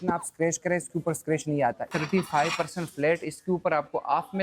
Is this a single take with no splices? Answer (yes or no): no